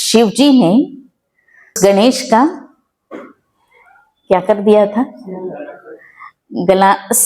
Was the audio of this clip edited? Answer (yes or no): yes